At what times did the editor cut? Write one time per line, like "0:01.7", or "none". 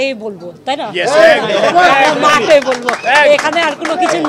none